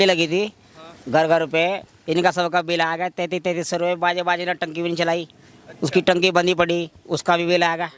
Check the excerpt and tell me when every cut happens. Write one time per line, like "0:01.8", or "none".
none